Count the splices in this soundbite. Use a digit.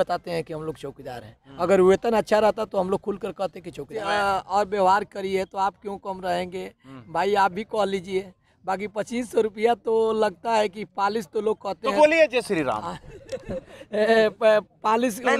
1